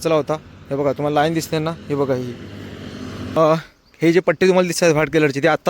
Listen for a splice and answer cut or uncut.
cut